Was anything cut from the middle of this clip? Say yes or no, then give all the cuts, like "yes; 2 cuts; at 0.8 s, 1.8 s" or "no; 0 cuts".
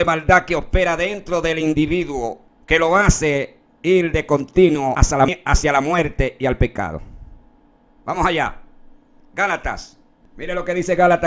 yes; 2 cuts; at 2.5 s, 5.2 s